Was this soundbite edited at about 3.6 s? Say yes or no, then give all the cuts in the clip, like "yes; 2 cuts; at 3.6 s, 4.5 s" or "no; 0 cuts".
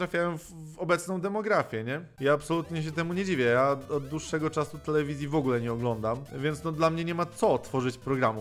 no; 2 cuts; at 2.1 s, 6.3 s